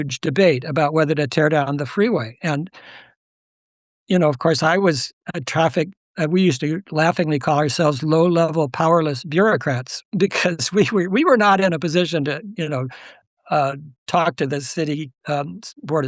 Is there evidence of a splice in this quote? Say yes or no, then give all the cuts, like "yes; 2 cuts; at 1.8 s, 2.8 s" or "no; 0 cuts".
no; 0 cuts